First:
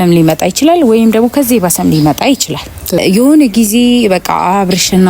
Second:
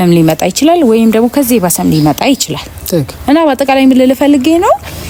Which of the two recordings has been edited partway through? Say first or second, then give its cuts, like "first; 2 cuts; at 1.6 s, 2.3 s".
first; 1 cut; at 3.0 s